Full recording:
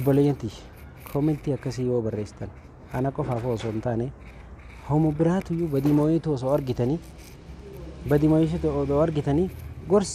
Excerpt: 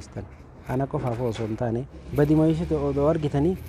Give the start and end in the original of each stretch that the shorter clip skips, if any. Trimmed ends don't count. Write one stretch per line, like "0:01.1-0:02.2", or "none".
0:04.2-0:07.9